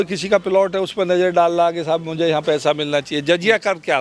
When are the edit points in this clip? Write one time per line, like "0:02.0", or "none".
none